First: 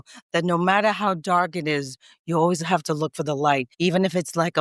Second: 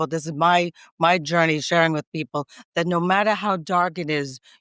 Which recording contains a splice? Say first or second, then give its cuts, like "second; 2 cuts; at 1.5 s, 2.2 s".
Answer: first; 1 cut; at 3.7 s